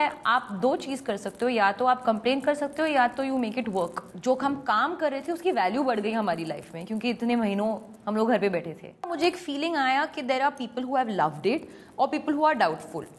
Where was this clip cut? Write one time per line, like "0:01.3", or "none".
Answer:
0:04.1
0:09.1